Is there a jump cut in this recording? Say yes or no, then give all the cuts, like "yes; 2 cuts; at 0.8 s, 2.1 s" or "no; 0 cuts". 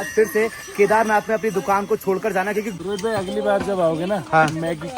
yes; 1 cut; at 2.7 s